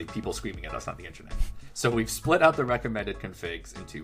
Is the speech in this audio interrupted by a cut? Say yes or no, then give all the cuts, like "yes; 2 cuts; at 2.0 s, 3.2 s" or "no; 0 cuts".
no; 0 cuts